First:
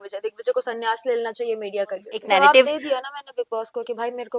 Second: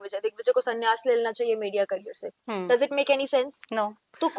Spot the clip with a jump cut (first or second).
first